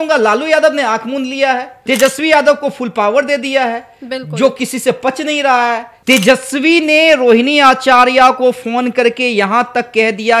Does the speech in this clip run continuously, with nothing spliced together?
no; 2 cuts; at 1.7 s, 5.9 s

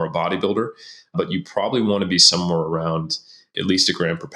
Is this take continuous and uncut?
no; 2 cuts; at 1.1 s, 3.5 s

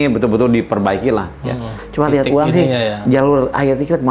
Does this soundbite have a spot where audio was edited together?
yes; 1 cut; at 1.8 s

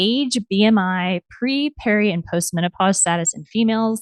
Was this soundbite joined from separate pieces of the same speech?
no; 0 cuts

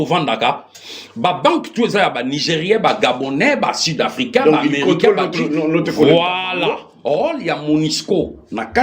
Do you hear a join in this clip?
yes; 1 cut; at 6.9 s

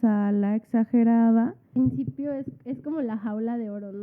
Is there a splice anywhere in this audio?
yes; 1 cut; at 1.7 s

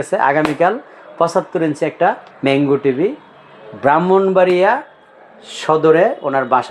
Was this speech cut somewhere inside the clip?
yes; 1 cut; at 2.3 s

